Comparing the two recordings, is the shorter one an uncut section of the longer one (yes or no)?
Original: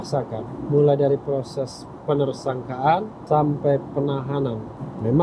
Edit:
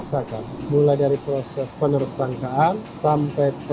no